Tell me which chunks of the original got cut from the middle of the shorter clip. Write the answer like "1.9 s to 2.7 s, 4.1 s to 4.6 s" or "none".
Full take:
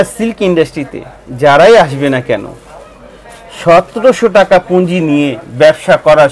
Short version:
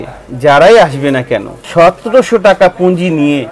2.5 s to 3.5 s